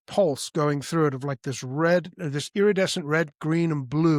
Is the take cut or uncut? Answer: uncut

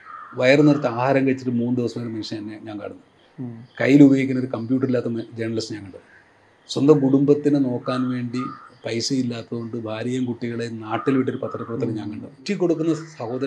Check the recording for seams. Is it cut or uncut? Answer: cut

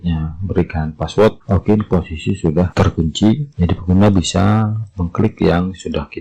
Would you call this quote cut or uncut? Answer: cut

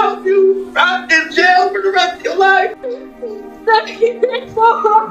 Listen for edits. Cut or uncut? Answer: cut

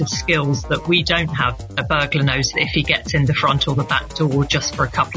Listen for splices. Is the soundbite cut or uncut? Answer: cut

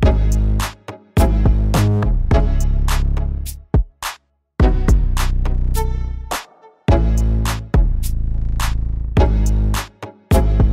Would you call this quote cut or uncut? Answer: uncut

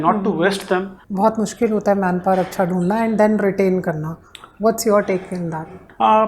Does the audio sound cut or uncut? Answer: cut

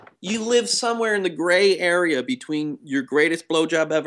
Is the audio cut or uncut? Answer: uncut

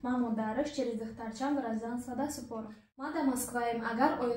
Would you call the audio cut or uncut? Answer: cut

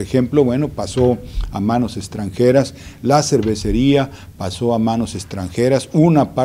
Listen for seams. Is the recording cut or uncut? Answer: uncut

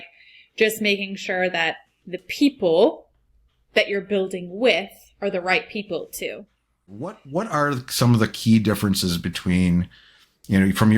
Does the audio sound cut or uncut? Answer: cut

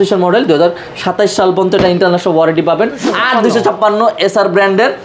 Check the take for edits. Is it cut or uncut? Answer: cut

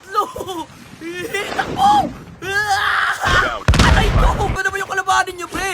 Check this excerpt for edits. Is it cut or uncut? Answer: cut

